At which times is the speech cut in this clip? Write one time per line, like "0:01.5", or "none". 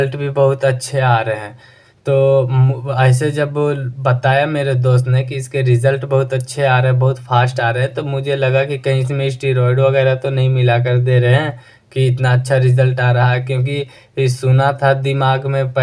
none